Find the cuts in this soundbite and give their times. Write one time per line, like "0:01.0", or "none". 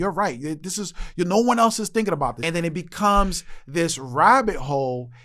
0:02.4